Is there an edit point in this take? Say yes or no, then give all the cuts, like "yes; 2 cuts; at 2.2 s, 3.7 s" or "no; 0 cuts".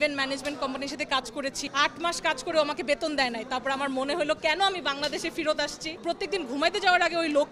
yes; 2 cuts; at 1.6 s, 6.0 s